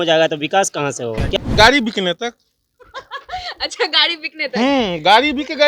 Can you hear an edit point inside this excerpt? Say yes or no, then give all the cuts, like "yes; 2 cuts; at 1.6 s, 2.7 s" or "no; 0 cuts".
yes; 1 cut; at 1.4 s